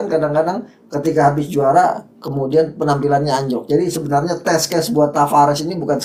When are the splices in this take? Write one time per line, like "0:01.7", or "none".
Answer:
none

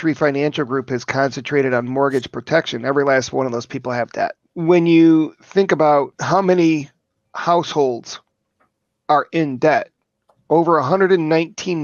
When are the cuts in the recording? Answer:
0:04.5
0:06.2

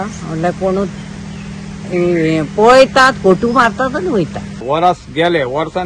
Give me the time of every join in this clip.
0:04.6

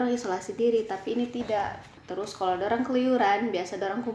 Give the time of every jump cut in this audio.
0:02.0

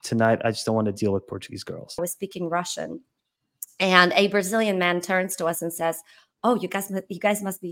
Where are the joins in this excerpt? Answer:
0:02.0

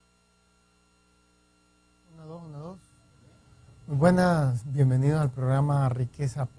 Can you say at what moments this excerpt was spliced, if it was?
none

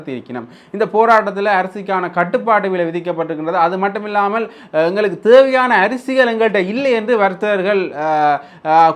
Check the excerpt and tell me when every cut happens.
none

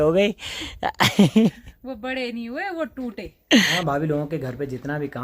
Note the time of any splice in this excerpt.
0:03.7

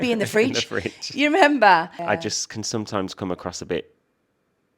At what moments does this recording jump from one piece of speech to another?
0:01.9

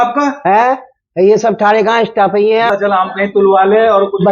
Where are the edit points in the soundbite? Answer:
0:02.7

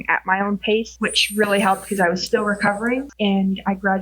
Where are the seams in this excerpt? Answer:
0:00.9
0:03.1

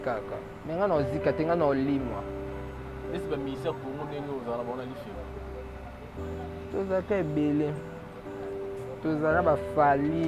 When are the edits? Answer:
none

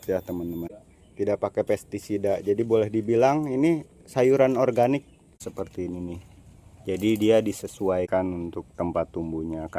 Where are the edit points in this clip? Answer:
0:01.1
0:05.4
0:08.1

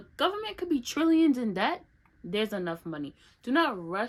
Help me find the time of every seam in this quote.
none

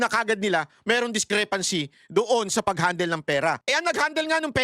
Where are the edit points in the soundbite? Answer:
0:03.6

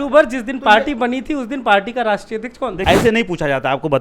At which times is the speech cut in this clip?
0:02.8

